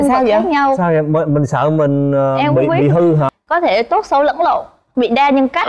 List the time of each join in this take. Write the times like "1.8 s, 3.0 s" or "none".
3.4 s